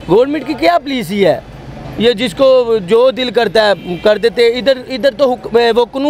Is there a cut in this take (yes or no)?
no